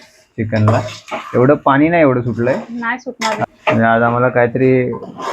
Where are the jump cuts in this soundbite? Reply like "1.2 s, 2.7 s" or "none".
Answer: 3.4 s